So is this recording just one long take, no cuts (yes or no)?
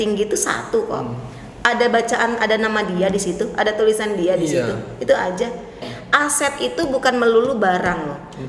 no